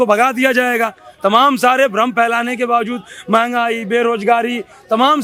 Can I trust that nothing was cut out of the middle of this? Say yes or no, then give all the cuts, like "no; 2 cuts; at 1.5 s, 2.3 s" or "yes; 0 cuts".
yes; 0 cuts